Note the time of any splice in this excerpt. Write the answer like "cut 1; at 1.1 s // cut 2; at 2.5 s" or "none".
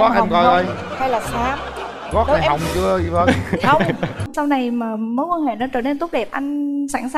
cut 1; at 4.3 s